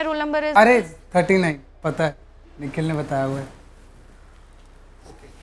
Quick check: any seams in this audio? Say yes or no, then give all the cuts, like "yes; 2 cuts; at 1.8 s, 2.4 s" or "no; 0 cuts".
no; 0 cuts